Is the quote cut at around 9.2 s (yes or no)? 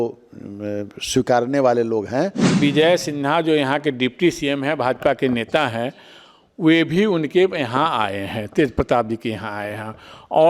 no